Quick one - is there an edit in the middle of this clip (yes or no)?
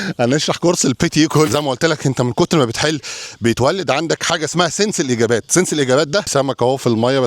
yes